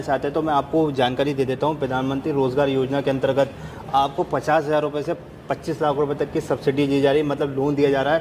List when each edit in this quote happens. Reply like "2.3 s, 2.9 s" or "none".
none